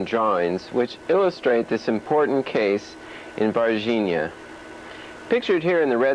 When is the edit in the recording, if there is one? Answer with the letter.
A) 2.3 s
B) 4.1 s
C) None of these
B